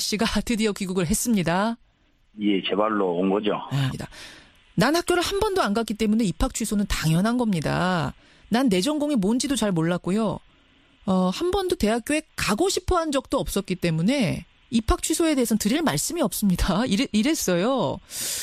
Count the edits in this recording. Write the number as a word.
zero